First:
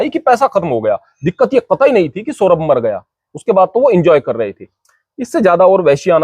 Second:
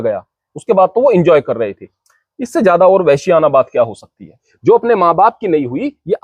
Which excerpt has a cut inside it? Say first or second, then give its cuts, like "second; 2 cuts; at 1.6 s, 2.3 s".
second; 1 cut; at 4.5 s